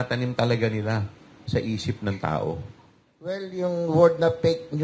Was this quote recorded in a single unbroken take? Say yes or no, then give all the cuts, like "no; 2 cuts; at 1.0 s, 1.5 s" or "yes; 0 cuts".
no; 1 cut; at 3.5 s